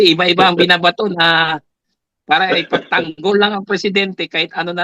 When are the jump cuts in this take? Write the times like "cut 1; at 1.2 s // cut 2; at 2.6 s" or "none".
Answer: none